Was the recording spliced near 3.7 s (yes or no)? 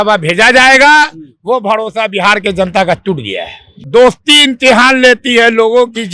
yes